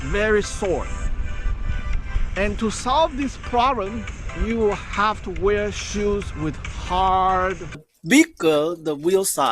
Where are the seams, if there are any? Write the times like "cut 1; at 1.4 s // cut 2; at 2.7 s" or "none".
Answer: cut 1; at 7.9 s